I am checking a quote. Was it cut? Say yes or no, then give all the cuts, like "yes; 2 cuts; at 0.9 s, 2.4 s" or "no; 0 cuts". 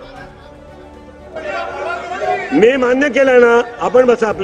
no; 0 cuts